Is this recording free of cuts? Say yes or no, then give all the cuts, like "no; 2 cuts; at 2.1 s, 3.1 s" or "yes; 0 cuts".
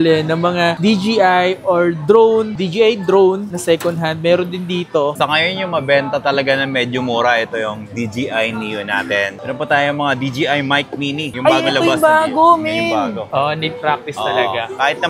no; 3 cuts; at 5.1 s, 9.4 s, 13.2 s